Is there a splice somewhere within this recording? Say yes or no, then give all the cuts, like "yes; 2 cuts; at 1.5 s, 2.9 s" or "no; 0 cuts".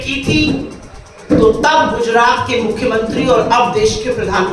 no; 0 cuts